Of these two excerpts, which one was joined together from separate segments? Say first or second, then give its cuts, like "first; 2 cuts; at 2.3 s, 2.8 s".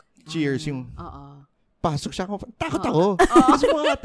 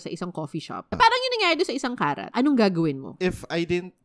second; 3 cuts; at 0.9 s, 2.2 s, 3.1 s